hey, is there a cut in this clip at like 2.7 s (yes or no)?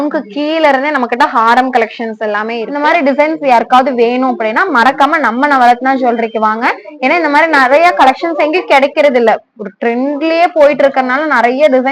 yes